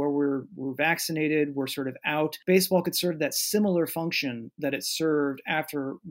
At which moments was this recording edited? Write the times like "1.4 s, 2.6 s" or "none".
2.4 s